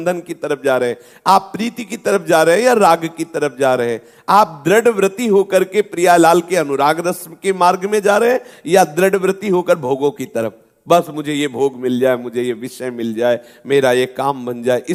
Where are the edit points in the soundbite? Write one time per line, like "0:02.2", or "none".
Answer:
none